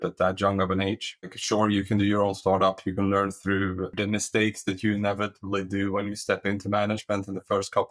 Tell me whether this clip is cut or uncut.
cut